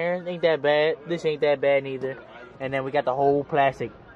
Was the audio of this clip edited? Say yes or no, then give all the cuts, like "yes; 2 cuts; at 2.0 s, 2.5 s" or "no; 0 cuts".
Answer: no; 0 cuts